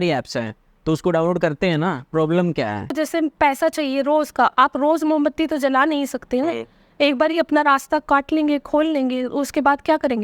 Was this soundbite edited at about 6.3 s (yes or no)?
no